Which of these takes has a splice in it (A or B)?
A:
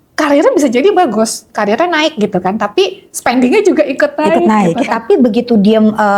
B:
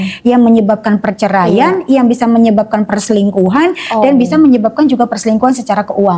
A